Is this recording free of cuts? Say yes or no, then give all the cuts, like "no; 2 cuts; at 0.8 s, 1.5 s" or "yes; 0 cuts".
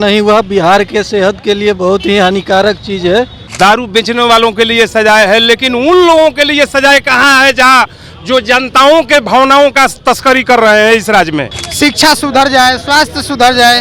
no; 2 cuts; at 3.4 s, 11.6 s